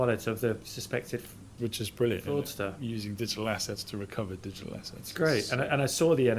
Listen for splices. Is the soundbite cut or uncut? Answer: uncut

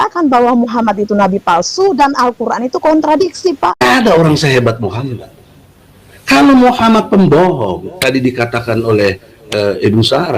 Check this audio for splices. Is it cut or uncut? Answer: cut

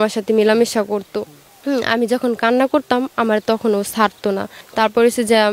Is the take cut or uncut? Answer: uncut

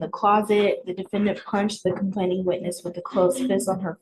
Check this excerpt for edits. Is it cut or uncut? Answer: uncut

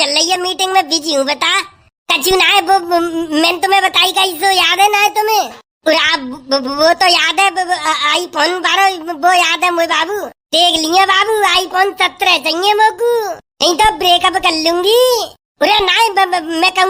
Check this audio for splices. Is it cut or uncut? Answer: uncut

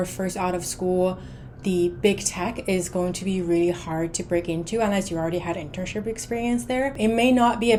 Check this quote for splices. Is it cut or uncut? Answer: uncut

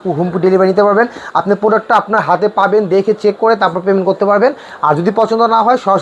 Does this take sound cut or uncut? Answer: uncut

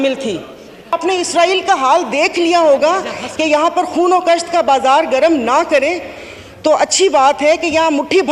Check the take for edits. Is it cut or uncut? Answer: cut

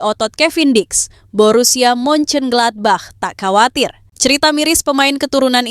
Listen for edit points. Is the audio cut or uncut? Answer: cut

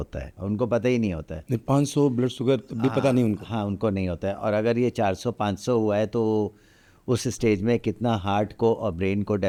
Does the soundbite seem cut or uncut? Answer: uncut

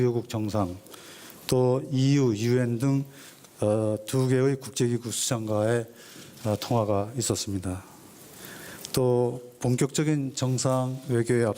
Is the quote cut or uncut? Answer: uncut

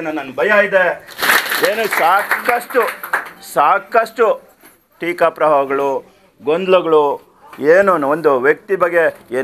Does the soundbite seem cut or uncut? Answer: cut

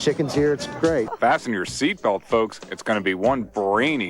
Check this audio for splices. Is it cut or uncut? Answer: cut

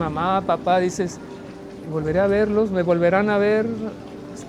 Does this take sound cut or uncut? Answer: uncut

